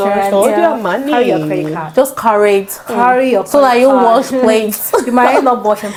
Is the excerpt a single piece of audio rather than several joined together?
yes; 0 cuts

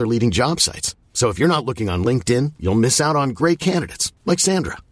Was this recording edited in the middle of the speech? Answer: no; 0 cuts

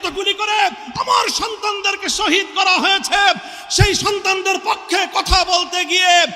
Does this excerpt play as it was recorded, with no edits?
yes; 0 cuts

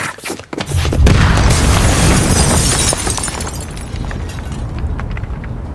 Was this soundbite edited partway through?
no; 0 cuts

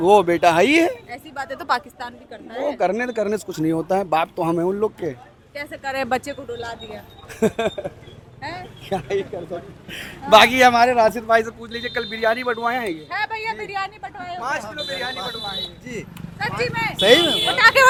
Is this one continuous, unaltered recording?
yes; 0 cuts

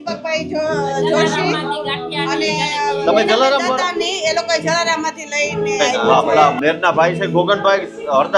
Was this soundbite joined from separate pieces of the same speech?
yes; 1 cut; at 6.3 s

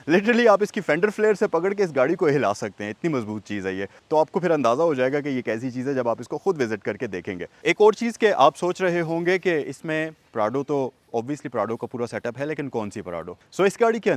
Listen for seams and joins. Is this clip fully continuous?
no; 1 cut; at 7.5 s

